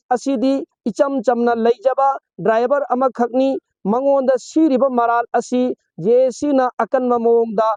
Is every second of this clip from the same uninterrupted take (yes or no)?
yes